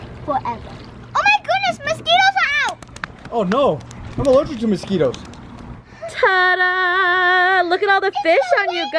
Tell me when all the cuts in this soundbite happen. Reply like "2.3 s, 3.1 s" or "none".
5.8 s